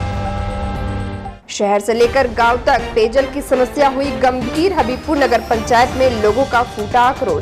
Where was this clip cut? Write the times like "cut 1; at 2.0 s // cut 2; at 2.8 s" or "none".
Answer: none